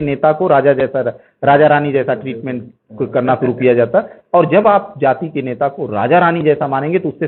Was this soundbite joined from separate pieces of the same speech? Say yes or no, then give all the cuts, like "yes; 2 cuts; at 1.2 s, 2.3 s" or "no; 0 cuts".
no; 0 cuts